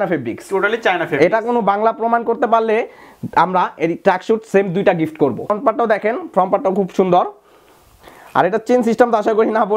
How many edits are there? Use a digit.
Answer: 1